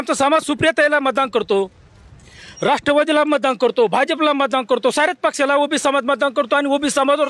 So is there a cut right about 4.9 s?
no; 0 cuts

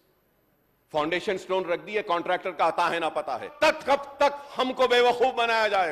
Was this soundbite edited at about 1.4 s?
no; 1 cut; at 3.5 s

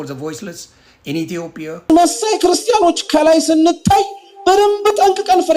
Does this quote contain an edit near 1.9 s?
yes; 1 cut; at 1.9 s

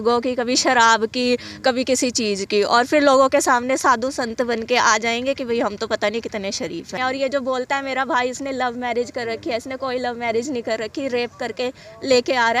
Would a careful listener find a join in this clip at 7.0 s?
yes; 1 cut; at 7.0 s

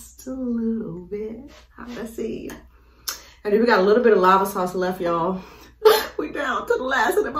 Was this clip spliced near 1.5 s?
no; 0 cuts

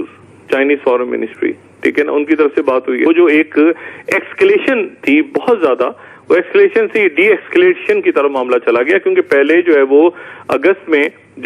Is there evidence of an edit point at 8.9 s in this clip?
no; 0 cuts

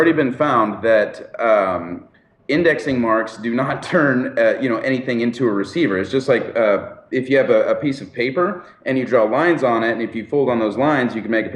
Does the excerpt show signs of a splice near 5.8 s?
no; 1 cut; at 1.1 s

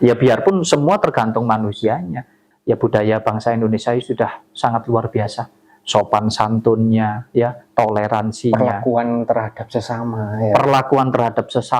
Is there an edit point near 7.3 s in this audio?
no; 1 cut; at 2.4 s

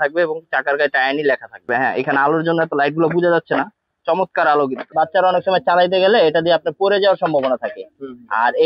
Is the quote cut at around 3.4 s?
no; 2 cuts; at 1.6 s, 4.8 s

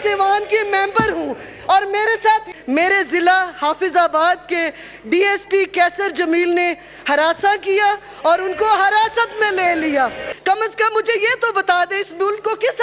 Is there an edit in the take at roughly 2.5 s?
yes; 2 cuts; at 2.5 s, 10.3 s

